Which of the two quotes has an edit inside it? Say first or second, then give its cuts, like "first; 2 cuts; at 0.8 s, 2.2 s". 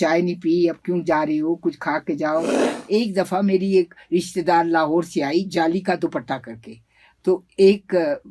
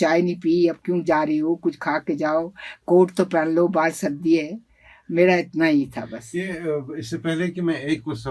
first; 1 cut; at 2.7 s